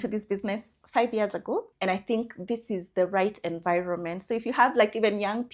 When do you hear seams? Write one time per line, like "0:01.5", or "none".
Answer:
0:01.7